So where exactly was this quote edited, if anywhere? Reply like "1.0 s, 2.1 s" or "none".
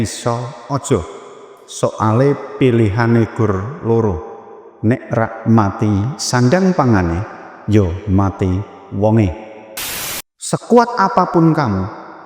10.0 s